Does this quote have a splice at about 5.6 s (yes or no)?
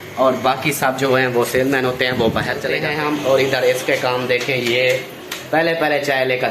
no